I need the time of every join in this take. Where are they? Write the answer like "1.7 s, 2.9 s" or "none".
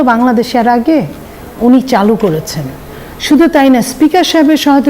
none

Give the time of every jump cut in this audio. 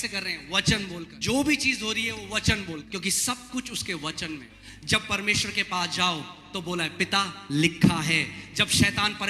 1.1 s, 2.8 s, 4.5 s

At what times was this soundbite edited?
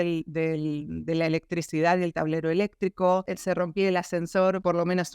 3.2 s

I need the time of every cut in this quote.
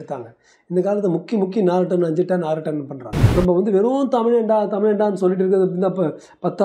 3.1 s

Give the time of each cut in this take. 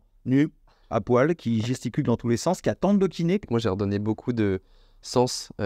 3.4 s

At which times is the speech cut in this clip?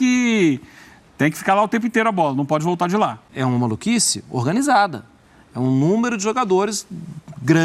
3.2 s

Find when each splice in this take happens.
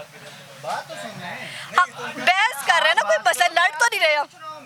none

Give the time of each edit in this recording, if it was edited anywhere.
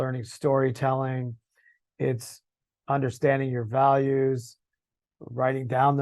none

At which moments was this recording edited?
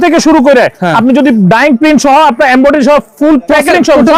none

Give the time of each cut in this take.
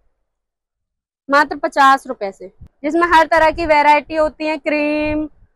2.7 s

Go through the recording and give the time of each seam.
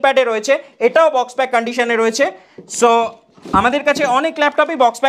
none

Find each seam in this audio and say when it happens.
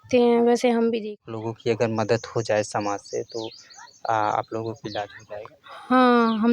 1.0 s

